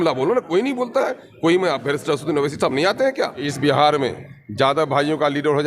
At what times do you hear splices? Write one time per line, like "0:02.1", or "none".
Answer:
0:03.5